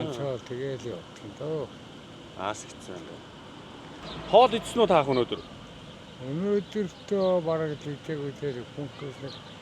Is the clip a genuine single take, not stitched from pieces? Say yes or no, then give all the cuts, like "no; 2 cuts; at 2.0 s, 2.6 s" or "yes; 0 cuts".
no; 1 cut; at 4.0 s